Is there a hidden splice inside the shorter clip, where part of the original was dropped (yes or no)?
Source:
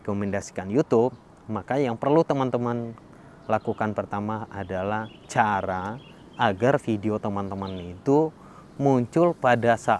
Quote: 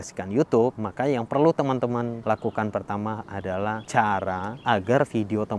yes